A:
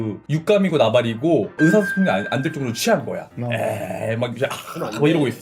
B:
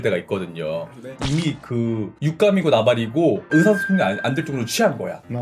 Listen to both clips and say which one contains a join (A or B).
B